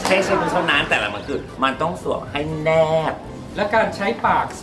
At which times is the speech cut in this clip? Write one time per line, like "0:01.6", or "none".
none